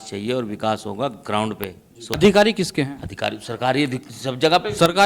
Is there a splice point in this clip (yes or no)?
yes